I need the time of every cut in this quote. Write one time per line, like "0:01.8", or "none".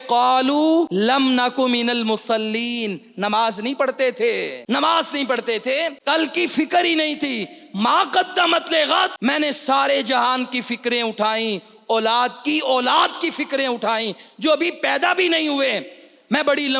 0:00.9
0:04.5
0:06.0
0:09.1